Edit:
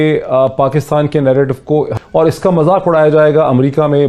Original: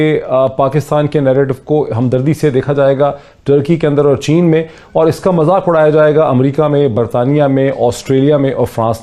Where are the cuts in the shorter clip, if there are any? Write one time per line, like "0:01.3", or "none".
0:02.0